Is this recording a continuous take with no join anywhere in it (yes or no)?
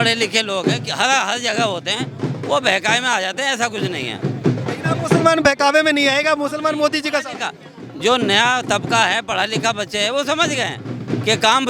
yes